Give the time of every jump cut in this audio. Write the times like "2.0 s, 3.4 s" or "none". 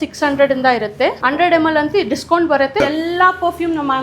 1.2 s, 2.8 s